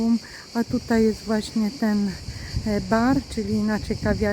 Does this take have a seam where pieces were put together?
no; 0 cuts

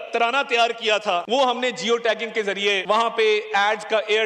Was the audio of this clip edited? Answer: yes; 2 cuts; at 1.2 s, 2.8 s

